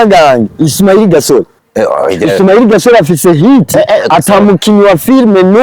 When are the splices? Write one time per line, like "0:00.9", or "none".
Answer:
0:01.6